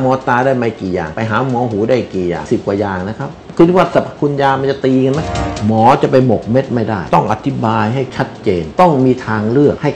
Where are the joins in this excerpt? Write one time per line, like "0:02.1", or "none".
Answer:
0:02.4
0:05.3
0:08.7